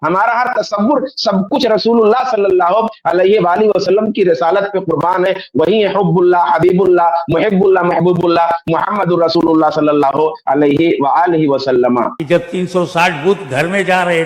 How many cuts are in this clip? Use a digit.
1